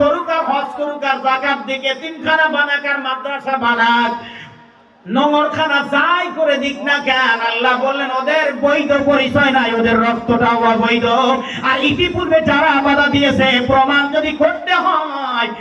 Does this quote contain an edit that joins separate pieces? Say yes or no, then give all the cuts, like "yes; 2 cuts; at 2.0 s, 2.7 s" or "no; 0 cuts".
no; 0 cuts